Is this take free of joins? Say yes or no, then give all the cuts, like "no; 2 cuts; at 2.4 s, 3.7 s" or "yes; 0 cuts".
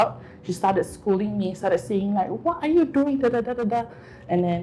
yes; 0 cuts